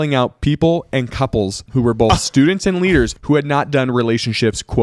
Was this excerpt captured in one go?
no; 2 cuts; at 1.6 s, 3.2 s

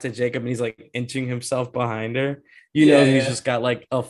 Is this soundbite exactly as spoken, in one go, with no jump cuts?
yes; 0 cuts

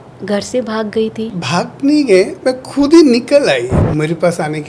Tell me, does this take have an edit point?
yes; 2 cuts; at 1.4 s, 3.8 s

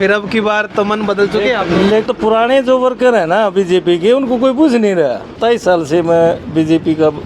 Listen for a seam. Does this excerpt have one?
yes; 2 cuts; at 2.1 s, 5.4 s

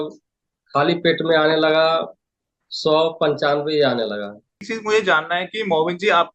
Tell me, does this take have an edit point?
yes; 1 cut; at 4.7 s

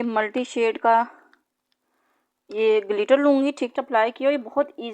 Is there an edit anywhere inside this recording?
yes; 1 cut; at 3.7 s

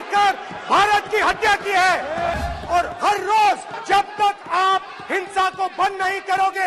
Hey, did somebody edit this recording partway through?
yes; 2 cuts; at 2.3 s, 3.7 s

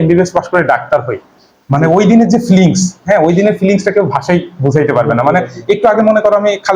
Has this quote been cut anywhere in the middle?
no; 0 cuts

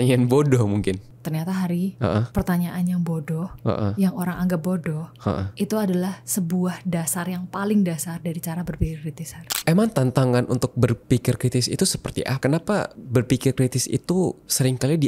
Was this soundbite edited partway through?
yes; 4 cuts; at 1.0 s, 9.4 s, 12.3 s, 13.0 s

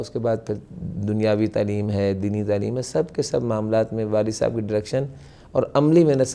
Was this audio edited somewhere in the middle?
no; 0 cuts

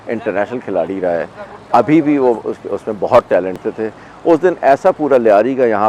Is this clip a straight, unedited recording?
no; 1 cut; at 3.6 s

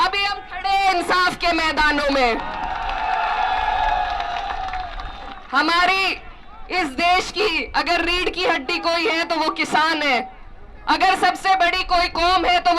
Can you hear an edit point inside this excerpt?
no; 0 cuts

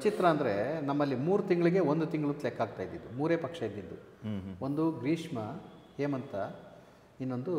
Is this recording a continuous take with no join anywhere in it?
yes; 0 cuts

